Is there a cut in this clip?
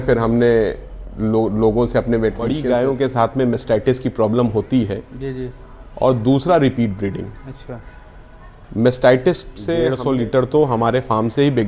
yes; 2 cuts; at 2.6 s, 9.9 s

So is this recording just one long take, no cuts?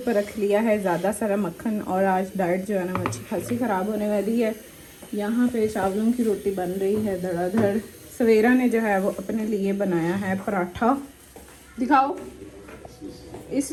yes; 0 cuts

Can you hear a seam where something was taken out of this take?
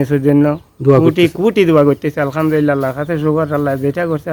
no; 0 cuts

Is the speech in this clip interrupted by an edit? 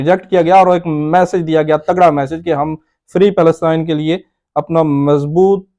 no; 0 cuts

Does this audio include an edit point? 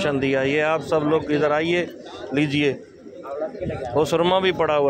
no; 0 cuts

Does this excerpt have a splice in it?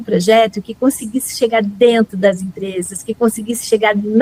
no; 0 cuts

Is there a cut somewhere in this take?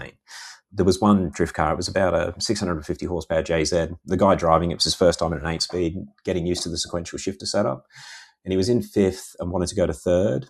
no; 0 cuts

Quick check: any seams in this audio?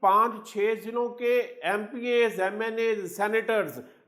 no; 0 cuts

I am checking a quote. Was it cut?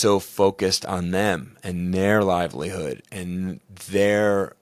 no; 0 cuts

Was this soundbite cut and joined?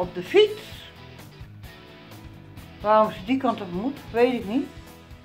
yes; 2 cuts; at 0.8 s, 2.3 s

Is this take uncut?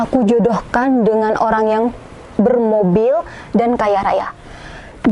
yes; 0 cuts

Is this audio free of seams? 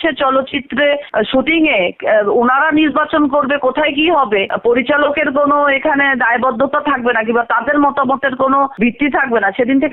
yes; 0 cuts

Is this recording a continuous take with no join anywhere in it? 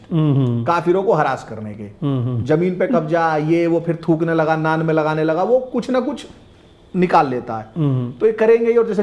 yes; 0 cuts

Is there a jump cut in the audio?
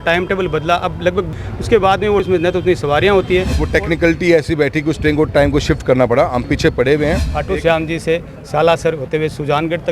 yes; 4 cuts; at 1.4 s, 2.2 s, 3.6 s, 7.3 s

